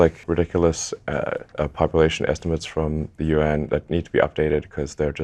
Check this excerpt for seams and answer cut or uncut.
uncut